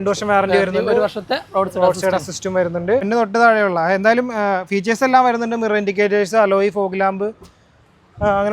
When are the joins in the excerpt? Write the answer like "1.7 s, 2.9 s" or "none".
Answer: 3.1 s